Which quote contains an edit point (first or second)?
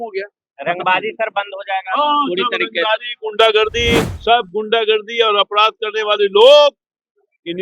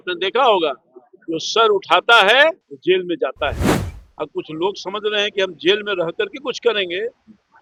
first